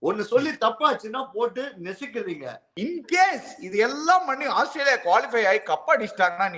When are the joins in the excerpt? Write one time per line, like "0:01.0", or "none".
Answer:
0:02.7